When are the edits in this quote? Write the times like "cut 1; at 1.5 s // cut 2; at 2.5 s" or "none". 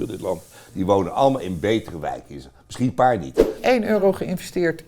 cut 1; at 3.6 s